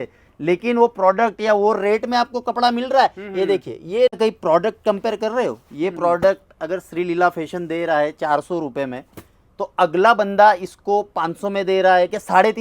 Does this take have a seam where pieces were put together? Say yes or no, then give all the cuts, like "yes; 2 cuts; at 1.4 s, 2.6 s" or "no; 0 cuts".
yes; 1 cut; at 4.1 s